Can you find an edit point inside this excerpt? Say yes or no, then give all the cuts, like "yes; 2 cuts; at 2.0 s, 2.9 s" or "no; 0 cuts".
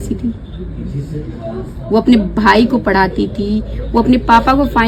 no; 0 cuts